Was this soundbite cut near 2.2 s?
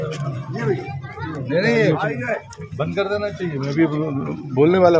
no; 0 cuts

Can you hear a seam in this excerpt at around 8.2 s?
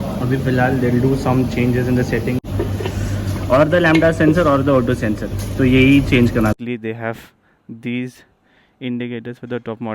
no; 2 cuts; at 2.5 s, 6.5 s

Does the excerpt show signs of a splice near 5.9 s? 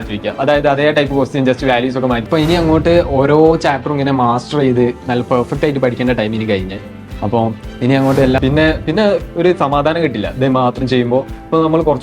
no; 2 cuts; at 2.2 s, 8.4 s

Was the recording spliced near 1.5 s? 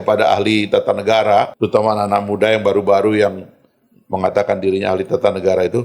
yes; 1 cut; at 1.5 s

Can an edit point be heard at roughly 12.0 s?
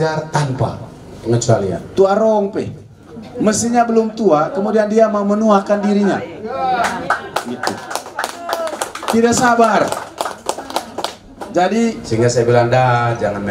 yes; 2 cuts; at 1.8 s, 12.0 s

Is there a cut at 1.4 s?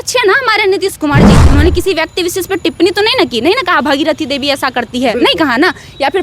yes; 1 cut; at 1.4 s

